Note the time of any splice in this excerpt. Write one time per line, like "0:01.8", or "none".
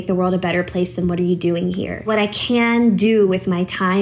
0:02.1